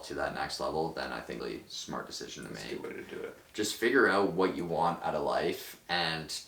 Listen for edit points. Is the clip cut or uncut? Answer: cut